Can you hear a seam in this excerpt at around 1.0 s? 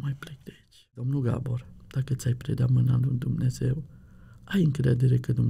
yes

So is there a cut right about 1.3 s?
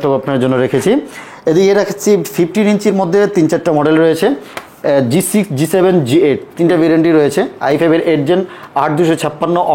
no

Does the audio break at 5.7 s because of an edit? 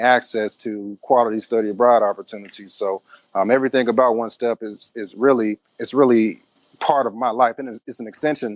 yes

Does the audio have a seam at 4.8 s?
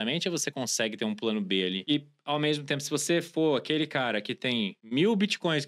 yes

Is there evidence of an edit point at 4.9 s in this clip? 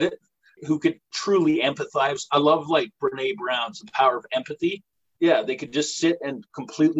yes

